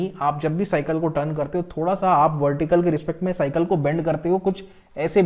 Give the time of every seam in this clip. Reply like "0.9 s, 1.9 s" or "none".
none